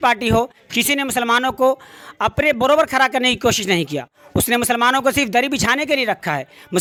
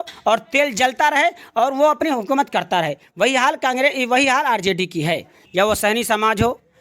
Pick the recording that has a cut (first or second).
second